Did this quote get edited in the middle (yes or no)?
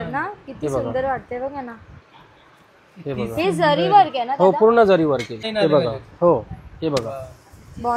yes